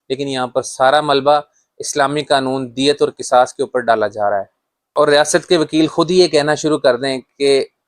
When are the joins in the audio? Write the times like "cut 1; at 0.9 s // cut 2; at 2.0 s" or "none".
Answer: cut 1; at 4.8 s